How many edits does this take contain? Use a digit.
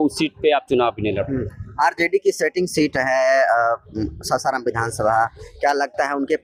0